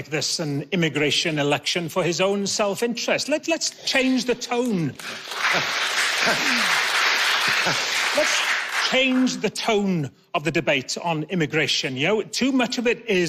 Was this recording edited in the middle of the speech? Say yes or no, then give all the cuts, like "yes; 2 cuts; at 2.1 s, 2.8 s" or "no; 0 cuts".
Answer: no; 0 cuts